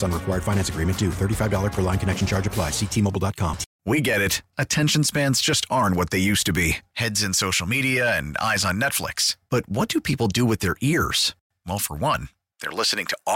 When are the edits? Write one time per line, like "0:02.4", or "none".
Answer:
0:03.7